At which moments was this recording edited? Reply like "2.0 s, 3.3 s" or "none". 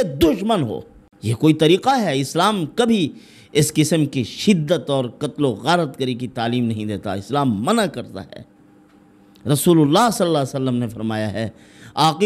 none